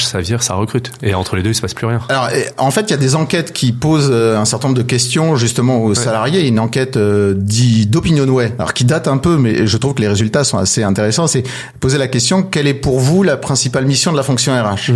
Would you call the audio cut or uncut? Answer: uncut